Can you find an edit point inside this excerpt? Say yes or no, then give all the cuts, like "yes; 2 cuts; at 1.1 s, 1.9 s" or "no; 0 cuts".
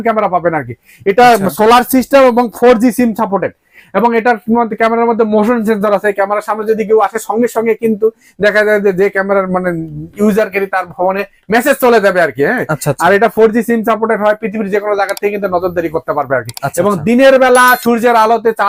no; 0 cuts